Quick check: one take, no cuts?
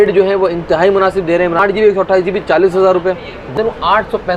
no; 2 cuts; at 1.6 s, 3.5 s

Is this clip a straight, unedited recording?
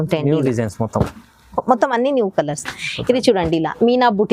yes; 0 cuts

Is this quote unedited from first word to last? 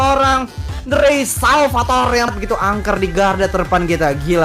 no; 1 cut; at 2.3 s

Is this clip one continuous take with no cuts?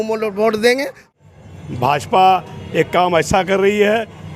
no; 1 cut; at 1.1 s

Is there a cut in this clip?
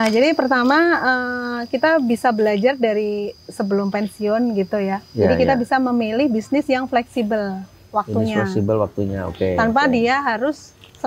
no; 0 cuts

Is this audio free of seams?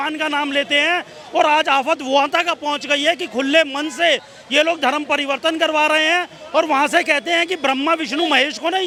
yes; 0 cuts

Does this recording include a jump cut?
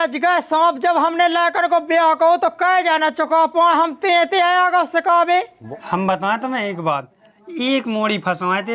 yes; 1 cut; at 5.6 s

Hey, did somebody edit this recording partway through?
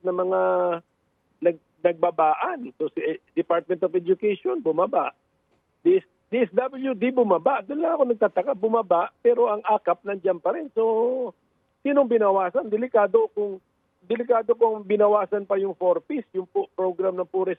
no; 0 cuts

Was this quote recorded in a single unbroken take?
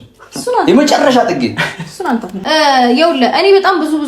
no; 1 cut; at 2.3 s

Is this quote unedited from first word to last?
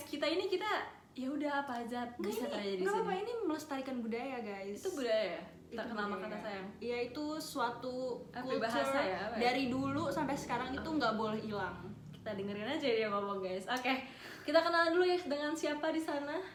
yes; 0 cuts

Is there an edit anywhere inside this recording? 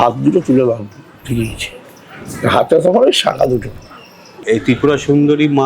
yes; 1 cut; at 4.4 s

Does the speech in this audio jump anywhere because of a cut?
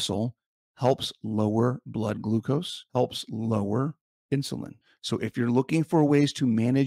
yes; 1 cut; at 2.8 s

